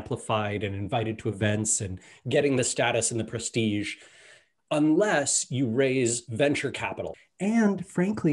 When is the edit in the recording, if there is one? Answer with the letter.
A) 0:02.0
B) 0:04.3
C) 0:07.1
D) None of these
C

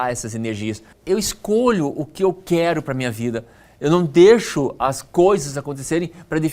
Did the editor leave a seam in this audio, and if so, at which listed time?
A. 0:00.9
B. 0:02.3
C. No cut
A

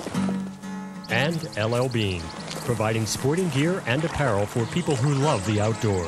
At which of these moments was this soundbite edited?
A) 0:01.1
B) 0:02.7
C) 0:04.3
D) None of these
A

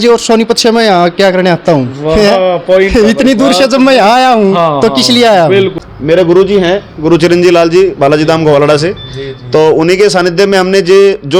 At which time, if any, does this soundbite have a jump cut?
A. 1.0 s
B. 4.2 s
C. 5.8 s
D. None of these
C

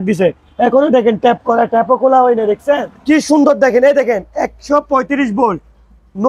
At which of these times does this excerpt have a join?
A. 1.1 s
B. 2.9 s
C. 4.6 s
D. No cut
B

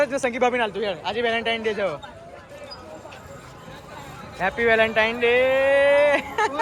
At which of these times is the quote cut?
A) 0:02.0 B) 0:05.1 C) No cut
C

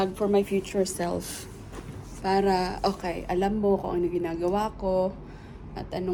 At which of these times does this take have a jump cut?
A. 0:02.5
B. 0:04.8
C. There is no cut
C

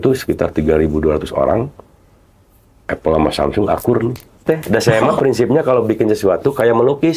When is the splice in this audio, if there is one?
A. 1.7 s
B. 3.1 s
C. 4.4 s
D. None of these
C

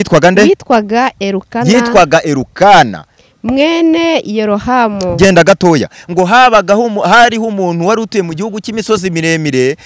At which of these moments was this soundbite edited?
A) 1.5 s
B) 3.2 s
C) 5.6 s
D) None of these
D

